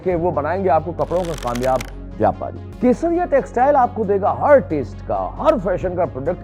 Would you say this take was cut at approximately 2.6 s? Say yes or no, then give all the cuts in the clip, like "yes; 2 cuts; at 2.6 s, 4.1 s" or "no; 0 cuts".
yes; 1 cut; at 2.6 s